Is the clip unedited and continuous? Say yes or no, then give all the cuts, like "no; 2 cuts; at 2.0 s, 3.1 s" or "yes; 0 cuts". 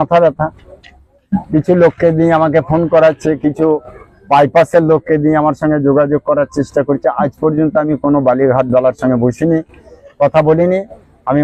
yes; 0 cuts